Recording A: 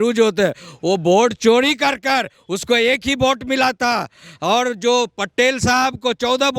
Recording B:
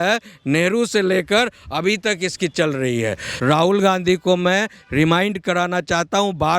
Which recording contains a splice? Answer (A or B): B